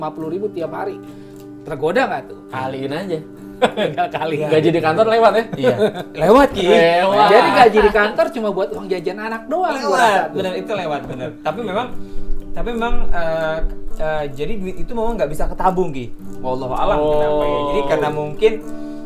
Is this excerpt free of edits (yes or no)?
yes